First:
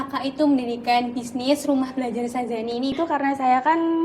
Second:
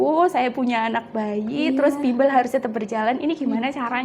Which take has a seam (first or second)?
first